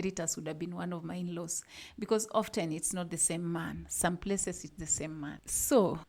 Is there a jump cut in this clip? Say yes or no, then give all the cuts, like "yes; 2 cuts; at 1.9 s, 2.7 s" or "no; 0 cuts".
no; 0 cuts